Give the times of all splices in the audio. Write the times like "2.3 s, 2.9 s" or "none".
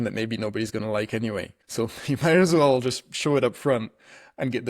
1.6 s